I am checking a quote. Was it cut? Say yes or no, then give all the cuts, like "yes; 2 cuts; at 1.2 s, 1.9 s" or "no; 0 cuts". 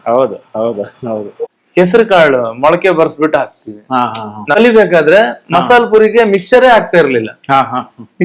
yes; 2 cuts; at 1.5 s, 4.5 s